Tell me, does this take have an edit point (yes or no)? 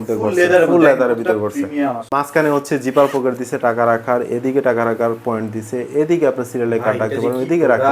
yes